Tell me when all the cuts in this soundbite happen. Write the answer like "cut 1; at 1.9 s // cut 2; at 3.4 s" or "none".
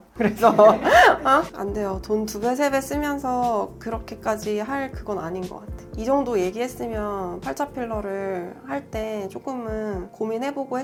none